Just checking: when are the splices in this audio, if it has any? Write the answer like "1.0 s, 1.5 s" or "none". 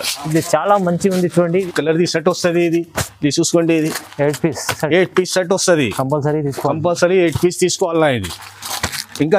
1.7 s